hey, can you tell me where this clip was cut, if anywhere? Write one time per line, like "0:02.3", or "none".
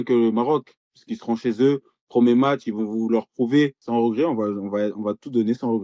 0:03.8